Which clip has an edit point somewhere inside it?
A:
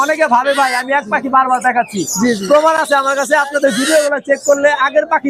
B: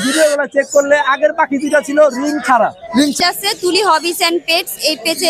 B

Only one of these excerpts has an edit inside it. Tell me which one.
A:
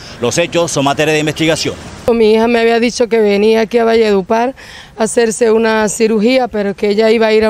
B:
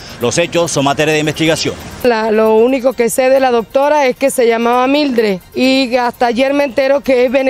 B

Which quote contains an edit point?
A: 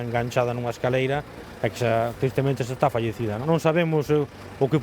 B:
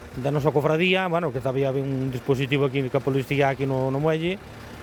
A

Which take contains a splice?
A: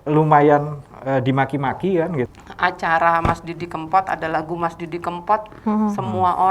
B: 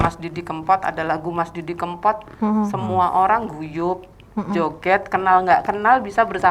A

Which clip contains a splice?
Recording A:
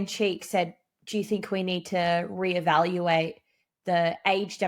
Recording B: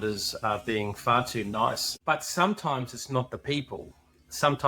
B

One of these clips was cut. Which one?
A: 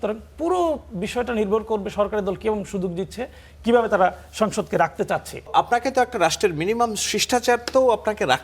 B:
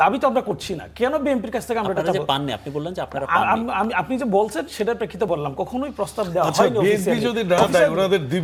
A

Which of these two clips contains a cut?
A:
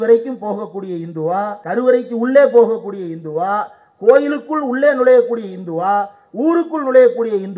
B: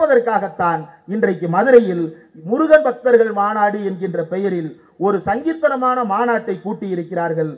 A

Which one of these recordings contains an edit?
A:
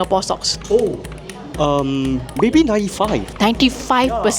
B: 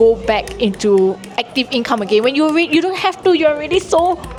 A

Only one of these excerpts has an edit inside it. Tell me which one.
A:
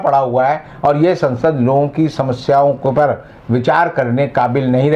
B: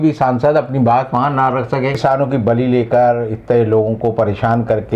B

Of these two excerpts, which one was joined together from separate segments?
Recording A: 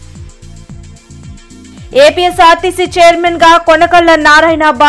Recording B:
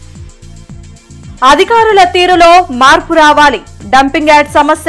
A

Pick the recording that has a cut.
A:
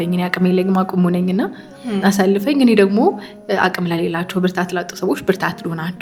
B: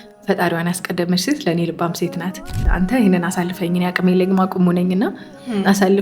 B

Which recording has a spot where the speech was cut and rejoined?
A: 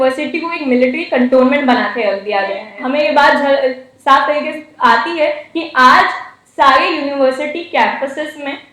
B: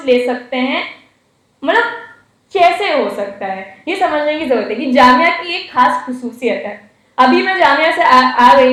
A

